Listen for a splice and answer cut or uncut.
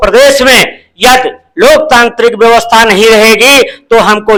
uncut